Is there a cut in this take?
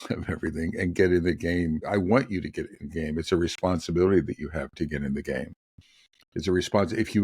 yes; 1 cut; at 1.8 s

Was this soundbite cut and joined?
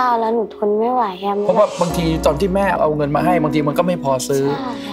no; 0 cuts

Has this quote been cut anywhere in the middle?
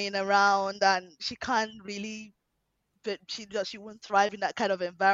no; 0 cuts

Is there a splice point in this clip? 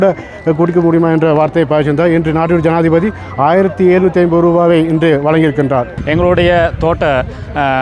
yes; 1 cut; at 6.0 s

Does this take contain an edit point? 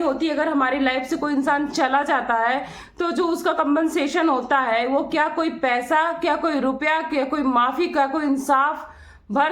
no; 0 cuts

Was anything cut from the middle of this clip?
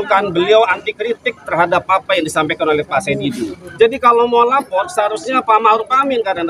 yes; 1 cut; at 3.6 s

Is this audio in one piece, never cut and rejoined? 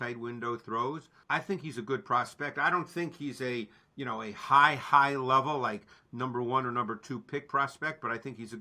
no; 1 cut; at 1.1 s

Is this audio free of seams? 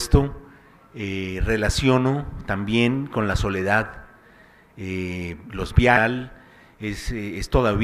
yes; 0 cuts

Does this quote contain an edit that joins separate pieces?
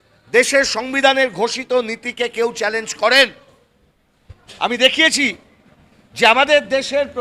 no; 0 cuts

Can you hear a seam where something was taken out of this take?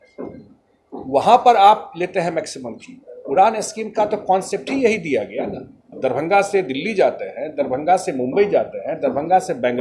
yes; 1 cut; at 5.9 s

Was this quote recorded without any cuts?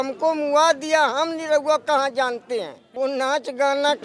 no; 1 cut; at 2.8 s

